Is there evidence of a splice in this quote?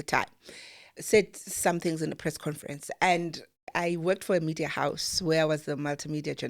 yes; 3 cuts; at 0.9 s, 2.2 s, 3.7 s

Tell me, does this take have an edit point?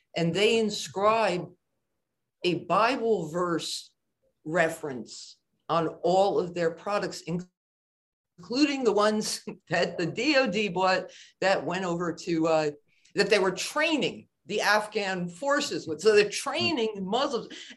no; 0 cuts

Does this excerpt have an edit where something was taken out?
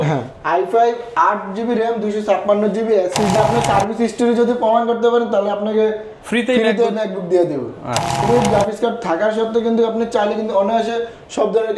yes; 2 cuts; at 3.3 s, 8.2 s

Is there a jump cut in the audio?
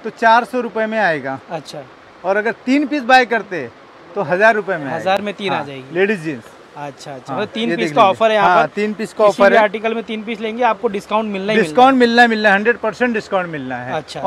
no; 0 cuts

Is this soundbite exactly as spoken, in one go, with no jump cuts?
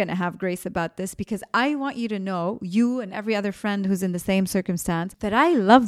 yes; 0 cuts

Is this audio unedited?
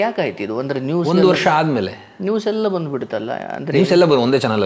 yes; 0 cuts

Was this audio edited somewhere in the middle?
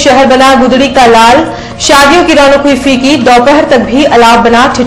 no; 0 cuts

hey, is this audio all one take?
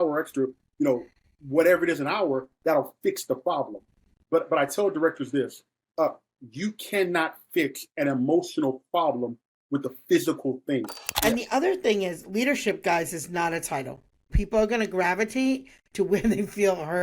no; 1 cut; at 11.0 s

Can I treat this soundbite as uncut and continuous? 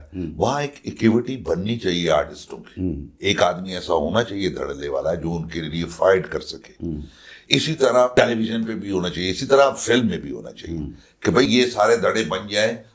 no; 1 cut; at 3.1 s

